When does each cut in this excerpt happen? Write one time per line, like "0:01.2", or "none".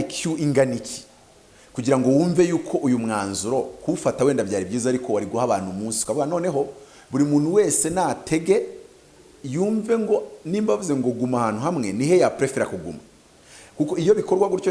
none